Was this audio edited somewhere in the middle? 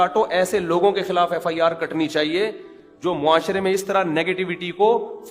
no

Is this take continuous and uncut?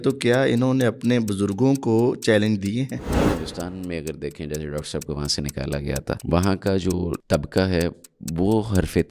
no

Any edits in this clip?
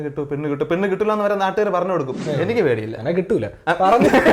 yes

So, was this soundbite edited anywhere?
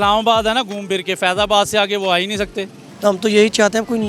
yes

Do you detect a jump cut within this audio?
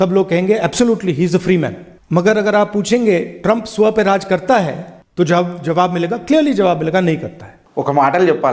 yes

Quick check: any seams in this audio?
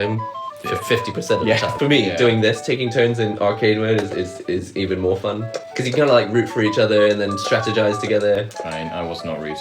yes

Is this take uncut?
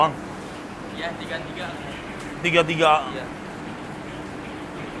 yes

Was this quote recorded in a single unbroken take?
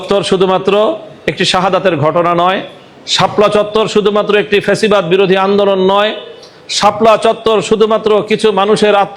yes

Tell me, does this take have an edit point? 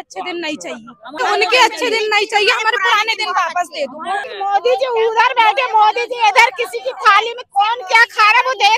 yes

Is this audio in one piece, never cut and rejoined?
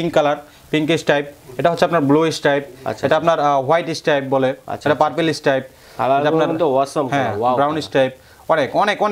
yes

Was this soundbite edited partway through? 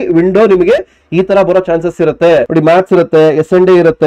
yes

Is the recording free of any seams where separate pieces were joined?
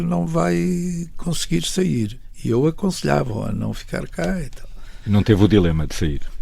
no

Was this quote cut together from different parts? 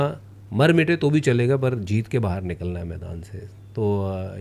no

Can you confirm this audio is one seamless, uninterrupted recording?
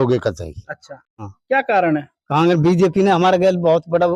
no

